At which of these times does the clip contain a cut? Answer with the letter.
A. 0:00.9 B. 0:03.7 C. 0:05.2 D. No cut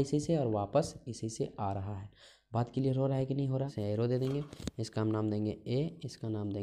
B